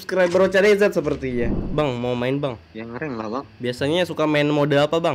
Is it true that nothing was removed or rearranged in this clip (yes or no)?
no